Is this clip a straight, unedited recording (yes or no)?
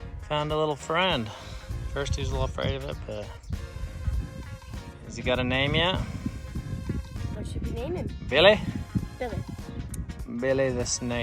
yes